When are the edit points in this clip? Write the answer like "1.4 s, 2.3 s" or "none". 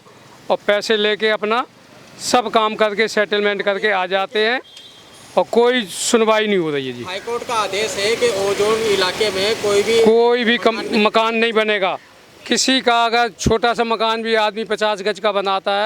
none